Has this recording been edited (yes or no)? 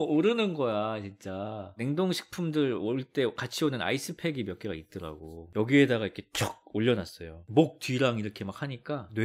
yes